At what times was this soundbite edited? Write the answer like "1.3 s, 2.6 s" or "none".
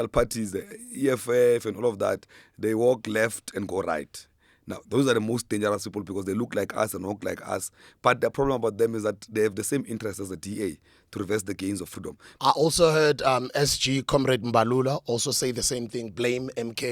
12.2 s